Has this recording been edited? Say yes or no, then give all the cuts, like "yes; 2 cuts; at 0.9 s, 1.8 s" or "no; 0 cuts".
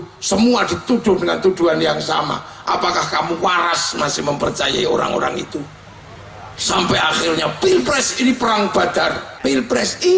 yes; 1 cut; at 9.3 s